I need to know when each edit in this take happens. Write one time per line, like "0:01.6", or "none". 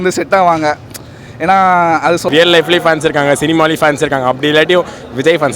0:02.3